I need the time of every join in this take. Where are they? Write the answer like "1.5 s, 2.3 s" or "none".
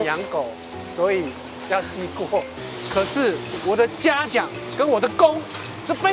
none